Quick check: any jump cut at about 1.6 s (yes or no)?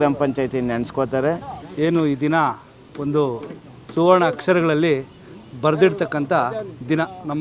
yes